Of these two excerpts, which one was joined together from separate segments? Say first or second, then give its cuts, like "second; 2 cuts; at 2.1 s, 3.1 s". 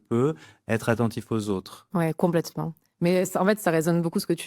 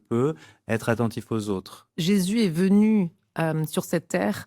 second; 1 cut; at 1.8 s